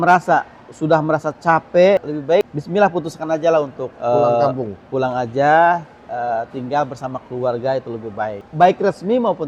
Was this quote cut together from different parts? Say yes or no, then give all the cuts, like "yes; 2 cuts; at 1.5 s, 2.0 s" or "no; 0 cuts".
yes; 3 cuts; at 2.2 s, 3.8 s, 8.4 s